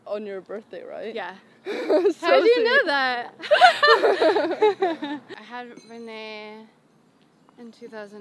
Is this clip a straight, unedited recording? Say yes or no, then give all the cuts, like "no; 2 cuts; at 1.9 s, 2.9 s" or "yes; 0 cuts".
no; 1 cut; at 5.3 s